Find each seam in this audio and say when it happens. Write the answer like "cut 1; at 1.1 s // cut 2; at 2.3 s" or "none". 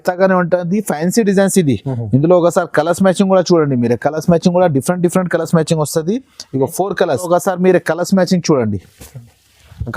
cut 1; at 7.3 s